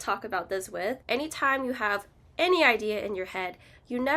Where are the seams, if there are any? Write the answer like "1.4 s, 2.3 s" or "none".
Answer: 1.0 s